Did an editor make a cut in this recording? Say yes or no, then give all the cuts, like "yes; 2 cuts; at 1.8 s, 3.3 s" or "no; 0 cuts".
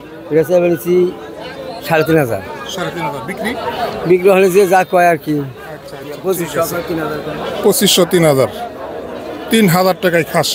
no; 0 cuts